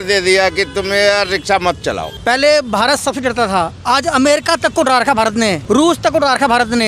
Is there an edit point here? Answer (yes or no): yes